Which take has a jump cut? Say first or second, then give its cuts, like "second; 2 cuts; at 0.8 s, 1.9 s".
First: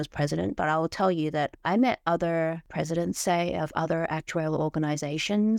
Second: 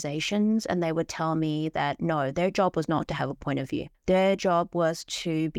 first; 1 cut; at 2.6 s